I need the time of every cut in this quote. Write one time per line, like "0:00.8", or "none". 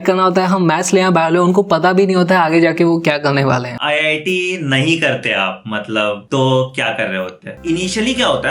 0:03.7
0:06.2
0:07.5